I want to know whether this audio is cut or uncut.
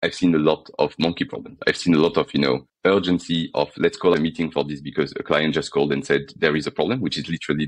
cut